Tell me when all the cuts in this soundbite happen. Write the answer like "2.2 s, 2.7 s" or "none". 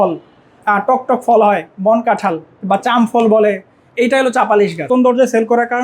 4.9 s